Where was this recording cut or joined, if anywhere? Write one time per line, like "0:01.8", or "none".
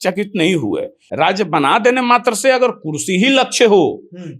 0:01.0

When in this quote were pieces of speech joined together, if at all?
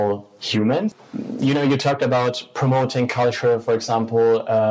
0:01.0

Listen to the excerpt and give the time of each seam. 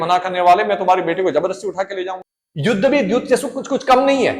0:02.1

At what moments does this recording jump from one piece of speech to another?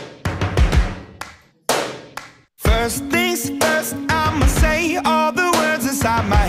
0:01.8

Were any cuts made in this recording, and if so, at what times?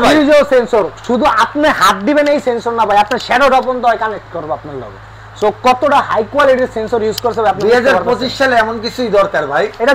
none

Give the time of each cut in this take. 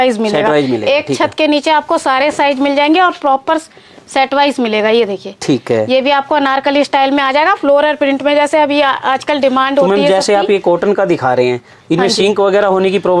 none

